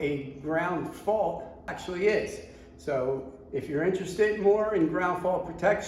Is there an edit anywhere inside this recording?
yes; 1 cut; at 1.7 s

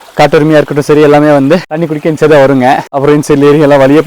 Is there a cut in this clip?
yes; 2 cuts; at 1.8 s, 2.9 s

